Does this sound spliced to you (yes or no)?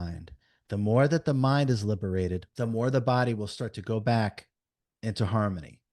yes